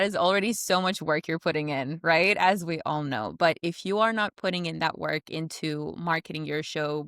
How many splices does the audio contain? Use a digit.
0